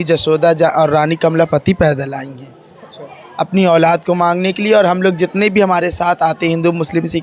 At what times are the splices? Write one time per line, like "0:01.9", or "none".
none